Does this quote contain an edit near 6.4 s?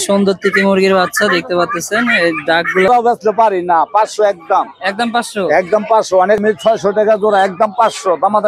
yes; 2 cuts; at 2.9 s, 6.4 s

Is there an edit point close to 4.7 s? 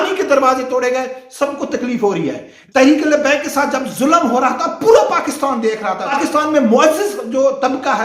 no; 2 cuts; at 2.5 s, 6.1 s

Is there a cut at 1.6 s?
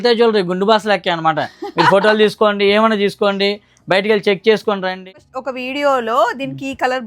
no; 1 cut; at 5.1 s

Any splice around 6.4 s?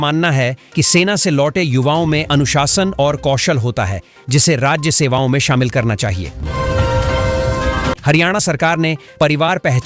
yes; 2 cuts; at 6.4 s, 8.0 s

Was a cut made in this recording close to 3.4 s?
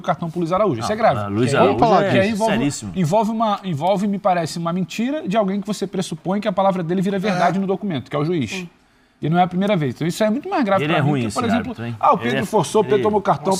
no; 0 cuts

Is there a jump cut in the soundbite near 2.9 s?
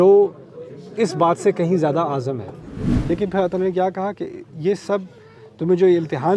yes; 1 cut; at 2.9 s

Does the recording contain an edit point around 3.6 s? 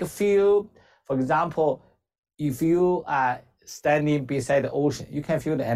no; 0 cuts

